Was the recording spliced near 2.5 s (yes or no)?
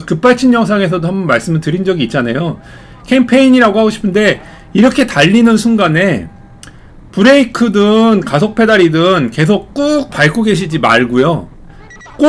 no